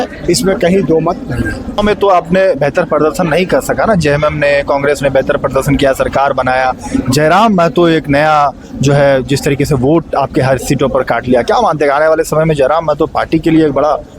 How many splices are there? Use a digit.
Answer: 1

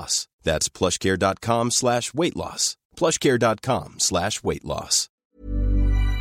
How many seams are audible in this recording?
1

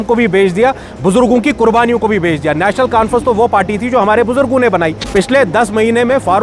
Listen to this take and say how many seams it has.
1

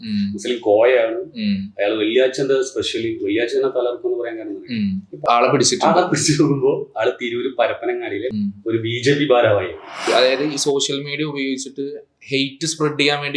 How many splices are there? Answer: 3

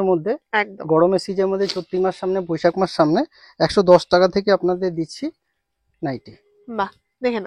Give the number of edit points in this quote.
0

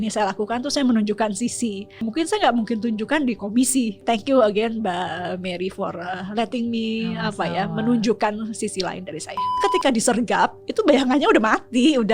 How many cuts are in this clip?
3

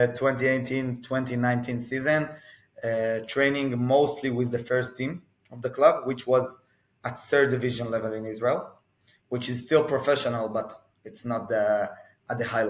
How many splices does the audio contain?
0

